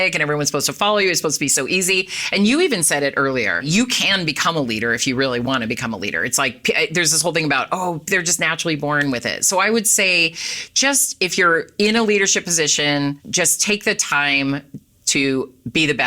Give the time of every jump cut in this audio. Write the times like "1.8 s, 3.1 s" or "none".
none